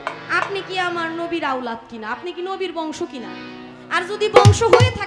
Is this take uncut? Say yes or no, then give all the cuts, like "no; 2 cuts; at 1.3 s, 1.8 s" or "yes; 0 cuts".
yes; 0 cuts